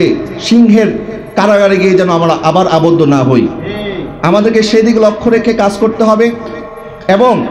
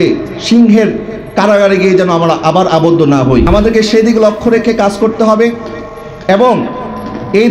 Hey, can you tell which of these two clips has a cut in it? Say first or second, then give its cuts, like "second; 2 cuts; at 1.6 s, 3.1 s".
second; 1 cut; at 3.5 s